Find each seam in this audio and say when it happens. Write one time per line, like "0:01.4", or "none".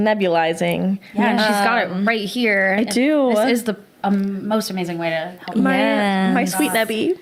none